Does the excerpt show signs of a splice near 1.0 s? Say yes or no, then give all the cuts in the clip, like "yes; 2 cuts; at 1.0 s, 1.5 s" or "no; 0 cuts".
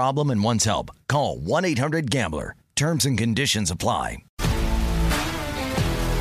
no; 1 cut; at 4.2 s